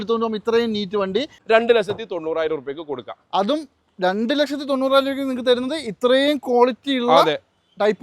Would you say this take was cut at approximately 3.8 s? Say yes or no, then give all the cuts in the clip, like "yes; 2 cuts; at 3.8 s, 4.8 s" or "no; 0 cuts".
no; 1 cut; at 1.4 s